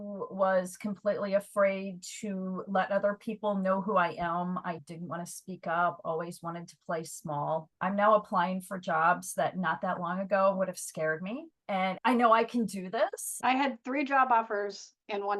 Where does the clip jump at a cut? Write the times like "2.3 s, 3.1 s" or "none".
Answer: 7.7 s, 11.8 s, 13.3 s